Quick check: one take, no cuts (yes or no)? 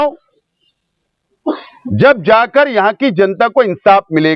yes